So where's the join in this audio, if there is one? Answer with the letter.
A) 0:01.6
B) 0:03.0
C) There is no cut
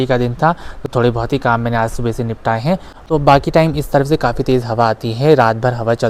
B